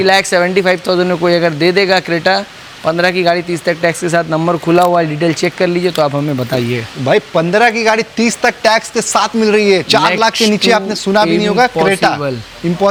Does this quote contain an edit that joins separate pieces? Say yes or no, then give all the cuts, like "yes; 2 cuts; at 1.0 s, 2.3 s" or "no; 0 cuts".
no; 0 cuts